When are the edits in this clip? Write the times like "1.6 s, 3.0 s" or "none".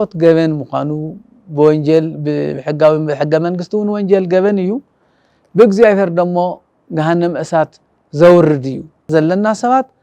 9.1 s